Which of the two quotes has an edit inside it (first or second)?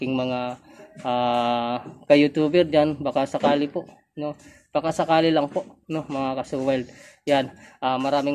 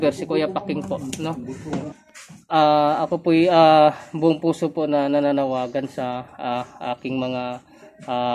second